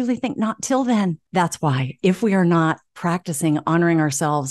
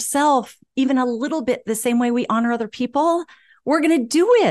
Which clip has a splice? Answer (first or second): first